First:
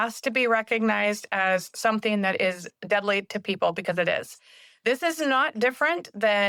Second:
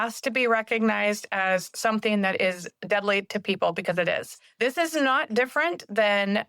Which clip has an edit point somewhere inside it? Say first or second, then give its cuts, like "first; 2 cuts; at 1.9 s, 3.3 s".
second; 1 cut; at 4.4 s